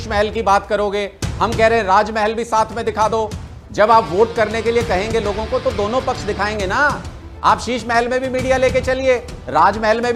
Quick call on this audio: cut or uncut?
uncut